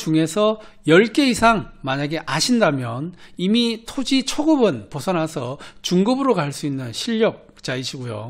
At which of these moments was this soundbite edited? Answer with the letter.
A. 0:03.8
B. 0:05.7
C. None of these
C